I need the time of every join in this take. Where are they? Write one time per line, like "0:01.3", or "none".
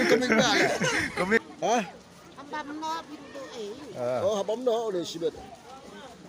0:01.4